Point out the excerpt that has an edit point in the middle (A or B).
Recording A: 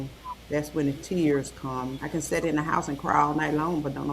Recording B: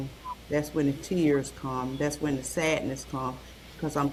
A